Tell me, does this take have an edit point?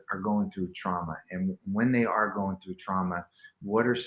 no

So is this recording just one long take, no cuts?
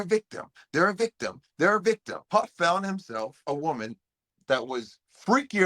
no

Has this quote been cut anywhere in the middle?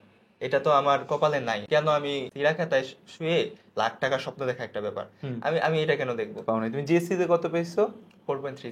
yes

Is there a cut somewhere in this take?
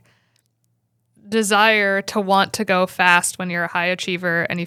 no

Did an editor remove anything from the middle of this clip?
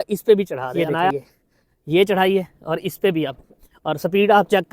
yes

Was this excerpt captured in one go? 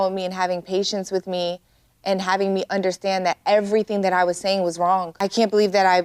no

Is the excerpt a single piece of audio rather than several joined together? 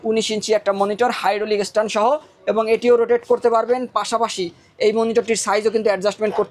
yes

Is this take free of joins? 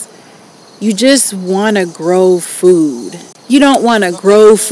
no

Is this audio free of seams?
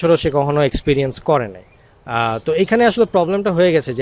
yes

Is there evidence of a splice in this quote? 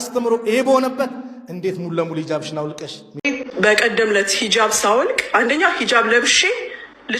yes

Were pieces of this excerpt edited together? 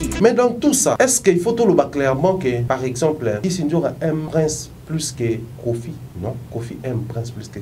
yes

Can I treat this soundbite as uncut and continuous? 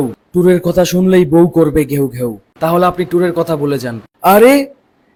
yes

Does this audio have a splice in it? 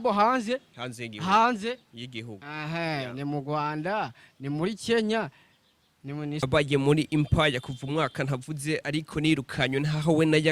yes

